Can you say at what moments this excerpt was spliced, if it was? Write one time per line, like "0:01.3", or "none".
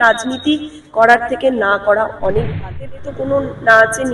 0:03.1